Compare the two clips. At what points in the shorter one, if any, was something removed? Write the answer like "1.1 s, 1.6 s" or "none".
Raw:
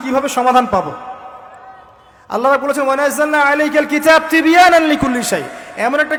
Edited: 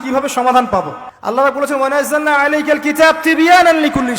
1.0 s